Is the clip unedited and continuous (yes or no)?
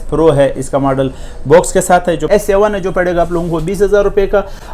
no